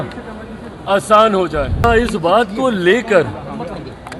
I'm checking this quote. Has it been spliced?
yes; 1 cut; at 1.8 s

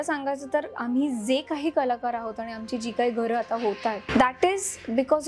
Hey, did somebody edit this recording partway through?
yes; 1 cut; at 4.0 s

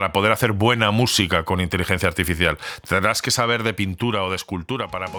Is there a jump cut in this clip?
no; 0 cuts

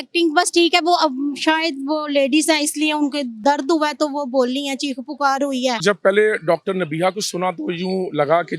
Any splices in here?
yes; 2 cuts; at 3.4 s, 5.8 s

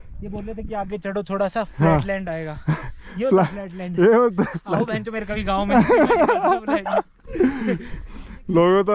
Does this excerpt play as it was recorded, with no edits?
yes; 0 cuts

